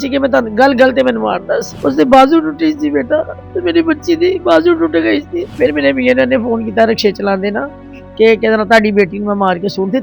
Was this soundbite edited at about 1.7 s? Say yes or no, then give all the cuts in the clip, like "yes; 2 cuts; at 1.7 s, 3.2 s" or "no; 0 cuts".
yes; 2 cuts; at 1.7 s, 5.4 s